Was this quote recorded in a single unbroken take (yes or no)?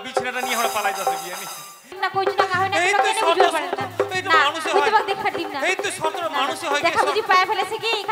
no